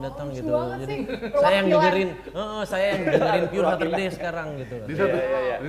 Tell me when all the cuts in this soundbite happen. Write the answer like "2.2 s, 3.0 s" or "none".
none